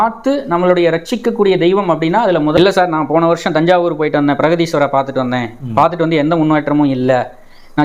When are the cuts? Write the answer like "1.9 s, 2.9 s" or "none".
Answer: 2.6 s

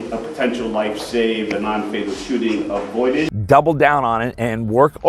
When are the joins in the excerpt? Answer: 3.4 s

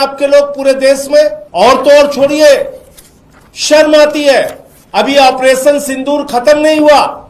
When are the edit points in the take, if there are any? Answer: 1.4 s

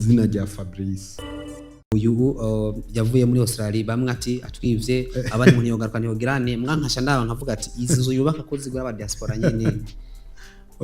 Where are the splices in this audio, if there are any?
1.6 s

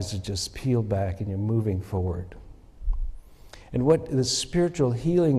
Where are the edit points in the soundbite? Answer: none

